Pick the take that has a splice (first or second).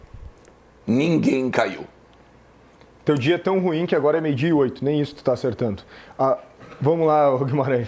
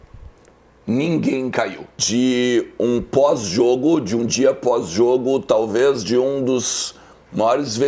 second